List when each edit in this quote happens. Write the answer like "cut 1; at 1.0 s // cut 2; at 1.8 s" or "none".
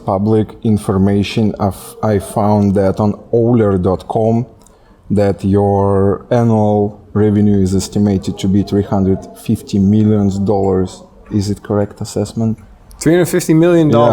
none